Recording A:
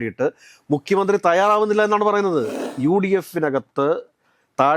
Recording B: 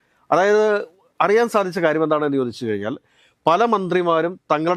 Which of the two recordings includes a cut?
A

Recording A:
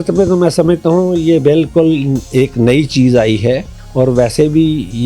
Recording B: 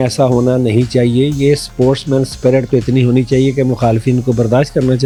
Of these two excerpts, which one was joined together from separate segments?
A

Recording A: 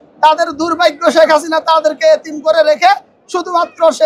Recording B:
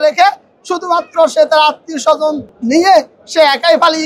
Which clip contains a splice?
B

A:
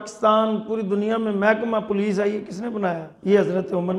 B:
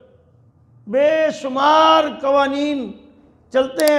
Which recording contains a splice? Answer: A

